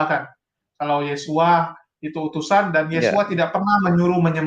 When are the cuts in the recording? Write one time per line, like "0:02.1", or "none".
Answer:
none